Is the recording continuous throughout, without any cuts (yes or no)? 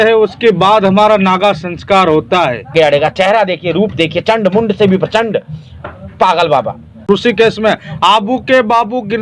no